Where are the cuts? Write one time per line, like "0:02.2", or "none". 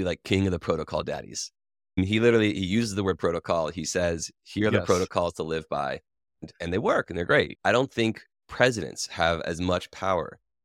0:02.0
0:06.4
0:07.5